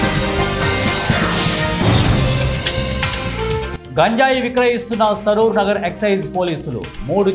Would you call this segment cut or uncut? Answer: cut